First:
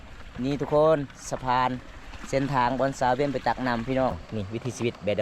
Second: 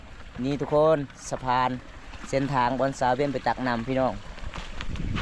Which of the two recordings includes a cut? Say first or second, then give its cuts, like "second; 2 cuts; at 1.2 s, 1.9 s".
first; 1 cut; at 4.2 s